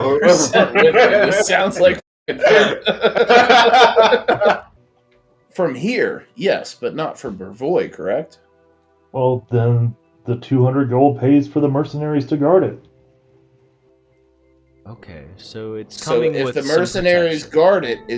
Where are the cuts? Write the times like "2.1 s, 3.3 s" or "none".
4.8 s